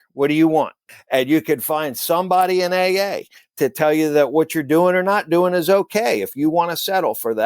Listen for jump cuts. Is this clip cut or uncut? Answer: cut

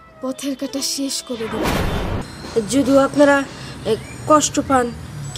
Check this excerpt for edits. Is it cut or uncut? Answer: cut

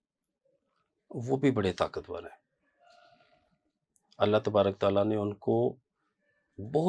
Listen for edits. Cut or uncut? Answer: uncut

